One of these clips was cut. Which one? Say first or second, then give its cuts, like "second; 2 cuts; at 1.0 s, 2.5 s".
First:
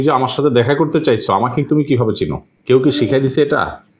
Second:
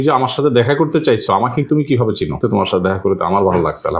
second; 1 cut; at 2.4 s